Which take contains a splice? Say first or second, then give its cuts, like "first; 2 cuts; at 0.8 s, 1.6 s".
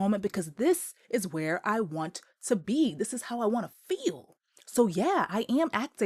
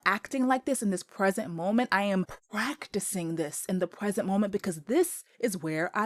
second; 1 cut; at 2.4 s